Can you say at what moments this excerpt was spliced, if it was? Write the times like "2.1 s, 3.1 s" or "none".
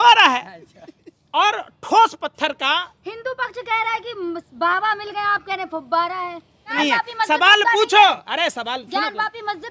6.7 s